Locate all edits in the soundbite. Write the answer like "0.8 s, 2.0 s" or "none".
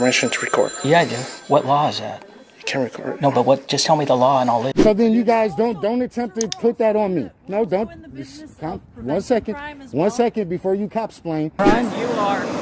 4.7 s, 11.5 s